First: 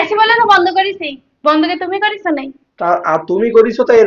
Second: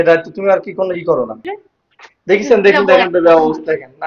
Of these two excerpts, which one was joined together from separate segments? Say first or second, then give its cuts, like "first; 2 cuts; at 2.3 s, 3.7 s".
second; 1 cut; at 1.5 s